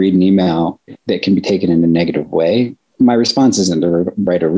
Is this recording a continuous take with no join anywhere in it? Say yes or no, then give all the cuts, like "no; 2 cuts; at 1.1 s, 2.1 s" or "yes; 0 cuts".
no; 2 cuts; at 1.0 s, 2.9 s